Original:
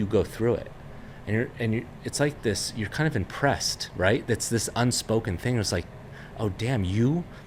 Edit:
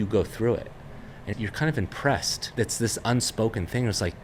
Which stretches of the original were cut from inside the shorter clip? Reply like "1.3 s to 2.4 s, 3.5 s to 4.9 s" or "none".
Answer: 1.3 s to 2.6 s, 3.9 s to 4.2 s